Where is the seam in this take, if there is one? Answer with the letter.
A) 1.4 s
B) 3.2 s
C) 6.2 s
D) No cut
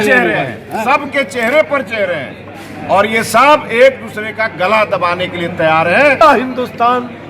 C